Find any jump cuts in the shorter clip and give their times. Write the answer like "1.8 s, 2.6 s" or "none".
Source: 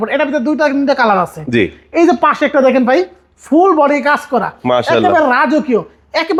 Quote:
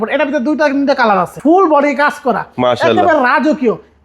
1.3 s